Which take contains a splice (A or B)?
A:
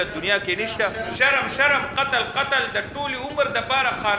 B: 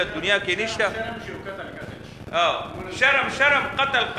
A